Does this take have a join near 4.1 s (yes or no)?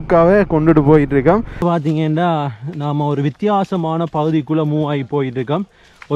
no